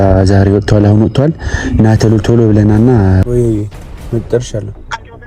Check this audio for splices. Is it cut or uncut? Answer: cut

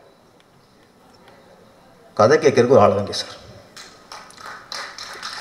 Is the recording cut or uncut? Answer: uncut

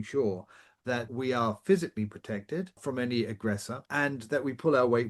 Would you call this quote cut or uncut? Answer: cut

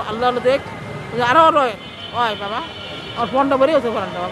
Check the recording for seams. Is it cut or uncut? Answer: uncut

